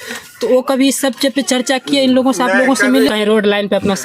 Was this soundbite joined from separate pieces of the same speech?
yes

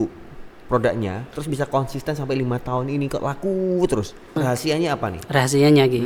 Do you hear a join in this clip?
no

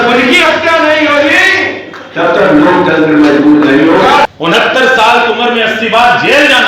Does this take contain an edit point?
yes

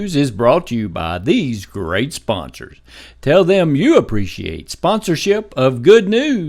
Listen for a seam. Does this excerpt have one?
no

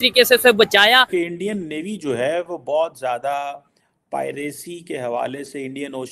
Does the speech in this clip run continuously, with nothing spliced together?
no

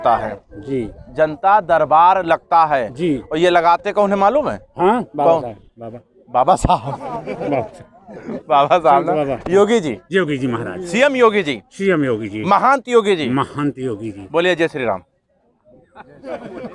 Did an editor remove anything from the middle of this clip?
no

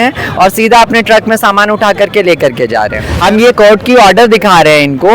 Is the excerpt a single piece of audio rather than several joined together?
no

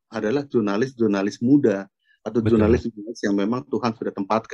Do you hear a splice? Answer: no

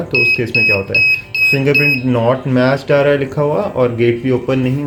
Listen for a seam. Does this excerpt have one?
no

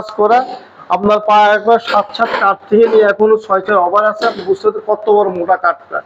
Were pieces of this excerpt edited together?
no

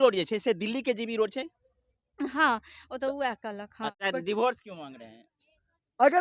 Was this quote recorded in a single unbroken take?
no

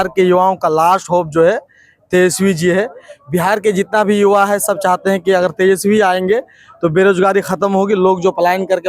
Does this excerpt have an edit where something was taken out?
no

